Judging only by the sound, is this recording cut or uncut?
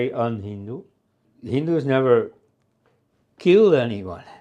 cut